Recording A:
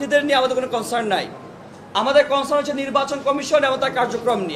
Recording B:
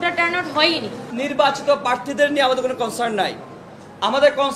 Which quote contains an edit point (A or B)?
B